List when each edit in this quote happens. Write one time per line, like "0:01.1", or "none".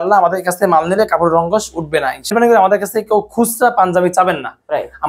0:02.3